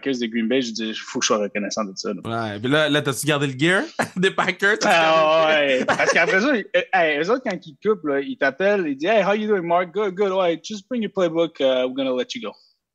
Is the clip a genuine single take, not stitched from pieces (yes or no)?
yes